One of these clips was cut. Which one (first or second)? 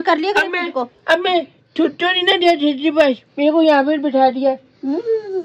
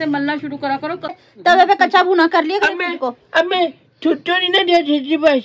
second